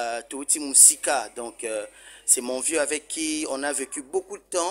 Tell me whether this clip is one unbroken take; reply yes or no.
yes